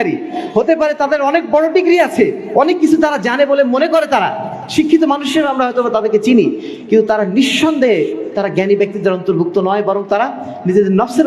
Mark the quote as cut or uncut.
uncut